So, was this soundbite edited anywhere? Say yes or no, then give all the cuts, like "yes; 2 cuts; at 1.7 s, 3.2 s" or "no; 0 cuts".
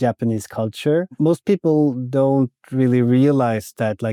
no; 0 cuts